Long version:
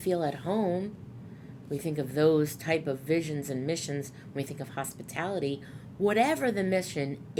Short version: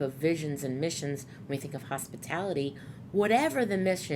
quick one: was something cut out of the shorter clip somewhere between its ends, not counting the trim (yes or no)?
no